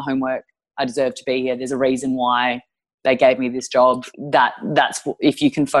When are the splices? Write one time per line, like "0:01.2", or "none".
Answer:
0:04.1